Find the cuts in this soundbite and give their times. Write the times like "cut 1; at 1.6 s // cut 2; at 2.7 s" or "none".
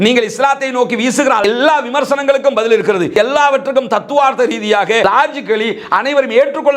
cut 1; at 3.1 s // cut 2; at 5.0 s